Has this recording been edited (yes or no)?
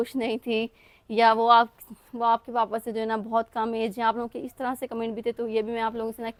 no